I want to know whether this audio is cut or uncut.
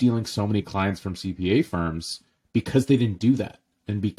uncut